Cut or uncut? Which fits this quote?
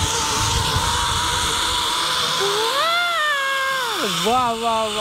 uncut